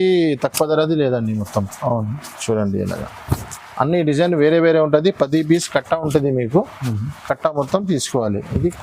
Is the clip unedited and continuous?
yes; 0 cuts

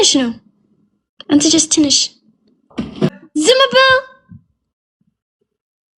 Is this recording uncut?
no; 1 cut; at 3.2 s

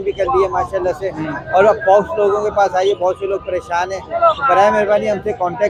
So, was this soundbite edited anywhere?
no; 0 cuts

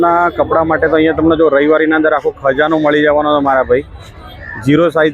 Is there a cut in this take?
no; 0 cuts

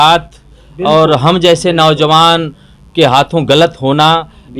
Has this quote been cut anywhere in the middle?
no; 0 cuts

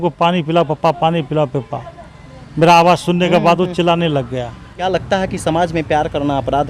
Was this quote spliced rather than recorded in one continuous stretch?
yes; 1 cut; at 4.7 s

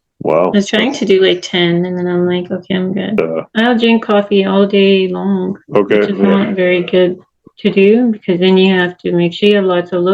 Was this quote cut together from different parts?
yes; 1 cut; at 3.1 s

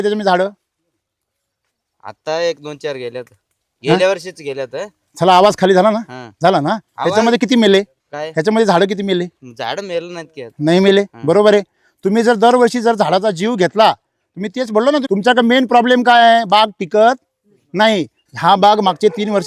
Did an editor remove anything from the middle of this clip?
yes; 2 cuts; at 15.0 s, 18.3 s

